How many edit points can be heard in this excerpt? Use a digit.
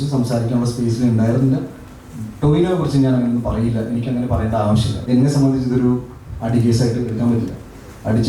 1